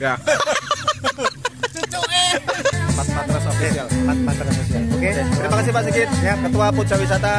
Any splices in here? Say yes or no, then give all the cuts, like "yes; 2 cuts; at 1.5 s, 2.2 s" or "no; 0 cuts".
yes; 1 cut; at 2.8 s